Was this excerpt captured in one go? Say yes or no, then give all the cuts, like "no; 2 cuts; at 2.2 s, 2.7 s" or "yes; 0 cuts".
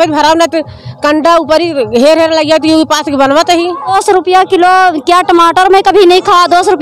no; 1 cut; at 3.9 s